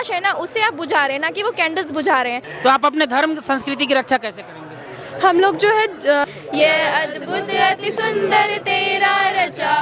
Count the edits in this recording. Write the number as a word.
two